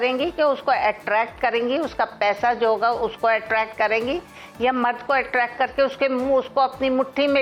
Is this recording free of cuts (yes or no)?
yes